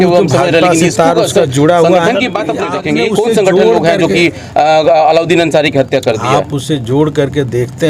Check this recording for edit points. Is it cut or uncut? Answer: cut